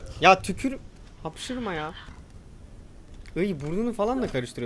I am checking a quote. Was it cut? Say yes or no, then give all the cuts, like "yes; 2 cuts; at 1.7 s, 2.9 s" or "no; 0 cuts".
yes; 1 cut; at 2.1 s